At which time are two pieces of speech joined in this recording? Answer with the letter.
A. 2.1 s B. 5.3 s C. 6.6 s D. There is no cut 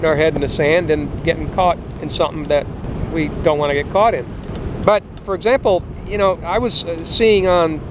B